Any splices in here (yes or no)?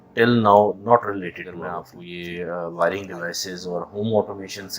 yes